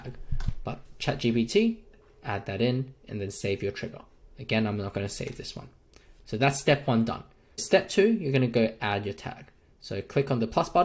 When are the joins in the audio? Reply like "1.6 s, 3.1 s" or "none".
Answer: 7.6 s